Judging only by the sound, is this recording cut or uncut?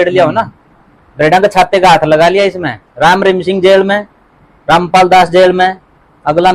uncut